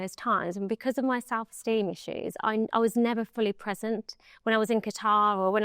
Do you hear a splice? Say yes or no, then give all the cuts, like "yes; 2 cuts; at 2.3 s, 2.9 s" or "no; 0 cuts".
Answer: no; 0 cuts